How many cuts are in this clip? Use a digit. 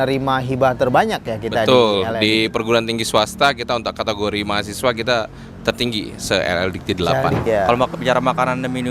1